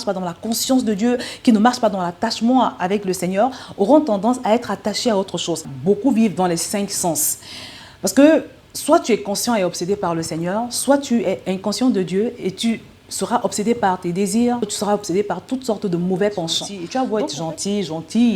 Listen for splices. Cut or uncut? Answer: cut